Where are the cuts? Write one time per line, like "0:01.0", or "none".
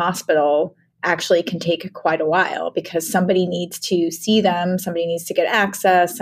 none